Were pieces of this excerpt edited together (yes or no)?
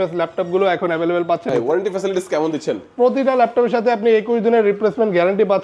yes